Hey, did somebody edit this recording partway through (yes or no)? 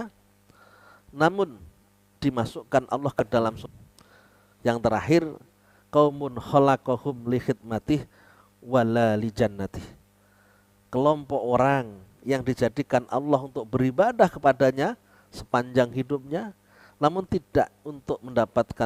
yes